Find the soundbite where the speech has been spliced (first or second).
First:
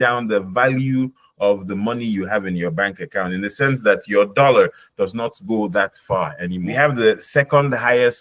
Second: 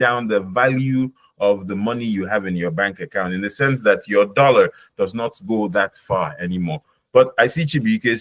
first